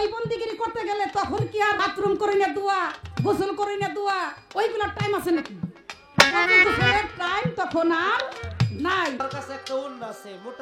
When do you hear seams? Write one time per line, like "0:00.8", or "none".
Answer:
0:01.9
0:09.2